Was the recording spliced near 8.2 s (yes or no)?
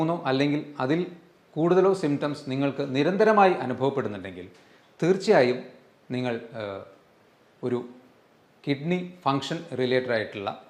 no